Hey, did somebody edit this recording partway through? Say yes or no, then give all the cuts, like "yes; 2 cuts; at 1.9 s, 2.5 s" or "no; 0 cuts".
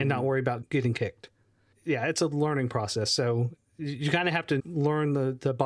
yes; 1 cut; at 4.6 s